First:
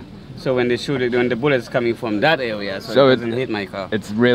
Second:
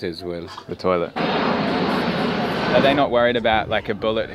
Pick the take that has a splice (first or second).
second